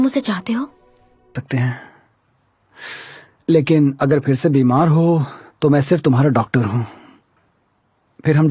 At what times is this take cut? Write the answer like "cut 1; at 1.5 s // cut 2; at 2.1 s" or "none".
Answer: cut 1; at 1.3 s